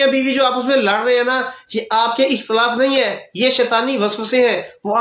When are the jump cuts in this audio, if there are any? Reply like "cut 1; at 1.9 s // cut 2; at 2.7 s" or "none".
none